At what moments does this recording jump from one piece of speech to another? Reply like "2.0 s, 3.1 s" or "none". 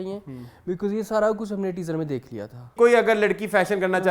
2.7 s

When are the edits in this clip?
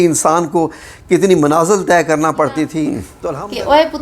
3.0 s

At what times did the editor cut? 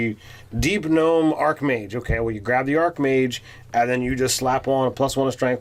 none

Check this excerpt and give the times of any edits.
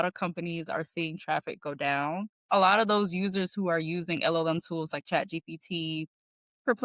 2.4 s

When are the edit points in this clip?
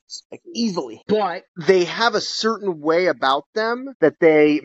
0.9 s

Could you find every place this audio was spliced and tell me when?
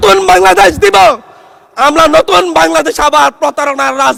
none

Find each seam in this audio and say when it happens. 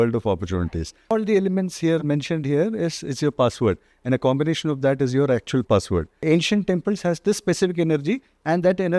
1.1 s, 6.1 s

